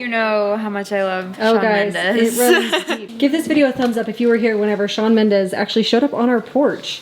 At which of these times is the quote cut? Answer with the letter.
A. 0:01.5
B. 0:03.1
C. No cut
B